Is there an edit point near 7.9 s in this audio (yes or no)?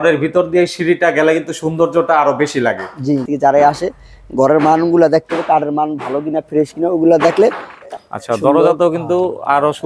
yes